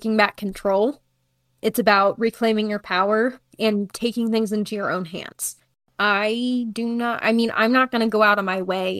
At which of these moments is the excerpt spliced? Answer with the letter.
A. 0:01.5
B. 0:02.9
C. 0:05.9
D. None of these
C